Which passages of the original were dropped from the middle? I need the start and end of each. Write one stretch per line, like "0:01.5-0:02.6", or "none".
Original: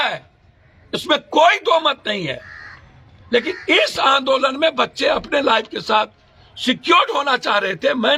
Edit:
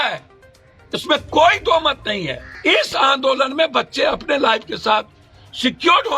0:02.5-0:03.5